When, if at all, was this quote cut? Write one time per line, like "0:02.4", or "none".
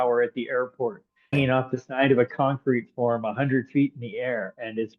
0:01.3